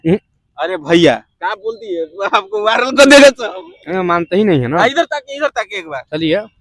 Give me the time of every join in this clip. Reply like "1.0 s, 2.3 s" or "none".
none